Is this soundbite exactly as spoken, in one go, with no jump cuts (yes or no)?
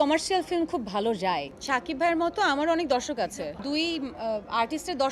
no